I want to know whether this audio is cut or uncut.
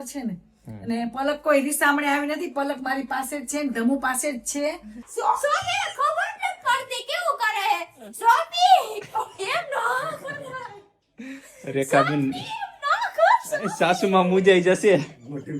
cut